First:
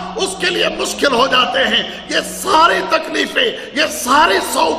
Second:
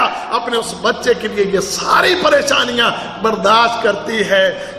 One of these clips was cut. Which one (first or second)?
first